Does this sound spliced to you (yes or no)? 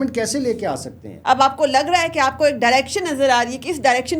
yes